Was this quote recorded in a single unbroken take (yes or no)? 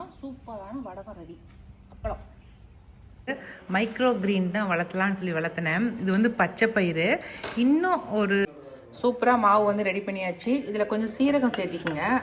no